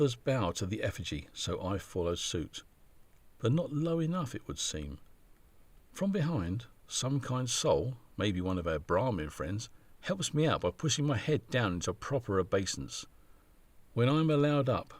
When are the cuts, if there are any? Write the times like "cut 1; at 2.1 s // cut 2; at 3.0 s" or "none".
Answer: none